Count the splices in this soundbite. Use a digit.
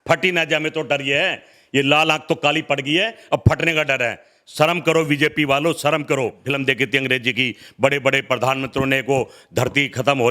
1